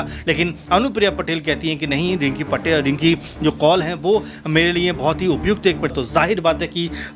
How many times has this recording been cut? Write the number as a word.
one